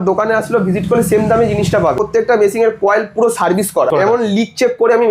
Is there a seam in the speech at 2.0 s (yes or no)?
yes